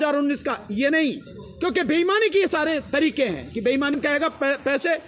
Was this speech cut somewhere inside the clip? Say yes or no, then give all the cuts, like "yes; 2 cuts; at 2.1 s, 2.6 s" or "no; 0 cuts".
yes; 1 cut; at 4.0 s